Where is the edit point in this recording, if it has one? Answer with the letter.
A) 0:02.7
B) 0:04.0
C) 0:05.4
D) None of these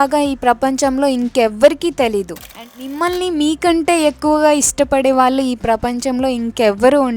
A